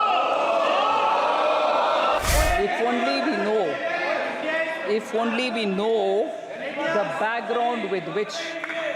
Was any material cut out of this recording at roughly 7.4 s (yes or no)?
no